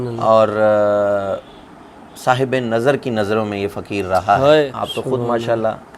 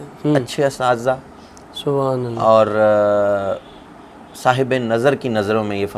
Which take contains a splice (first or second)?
first